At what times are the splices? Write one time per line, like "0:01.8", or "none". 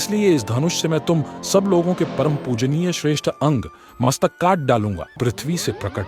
0:05.1